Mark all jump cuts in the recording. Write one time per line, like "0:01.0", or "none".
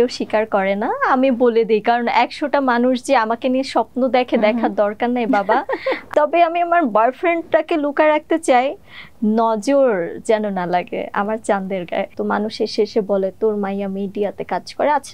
0:06.0
0:12.1

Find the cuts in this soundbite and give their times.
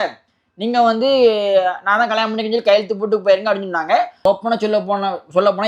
0:04.2

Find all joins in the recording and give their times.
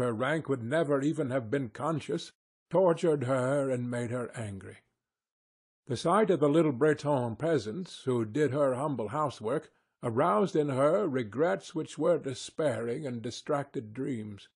0:01.8

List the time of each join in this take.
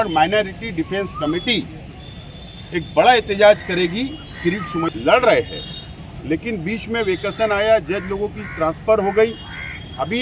0:04.9

